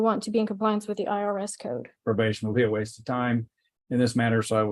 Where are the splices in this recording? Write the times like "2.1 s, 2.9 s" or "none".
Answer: 1.9 s